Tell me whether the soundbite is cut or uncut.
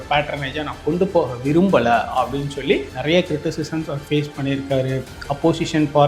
cut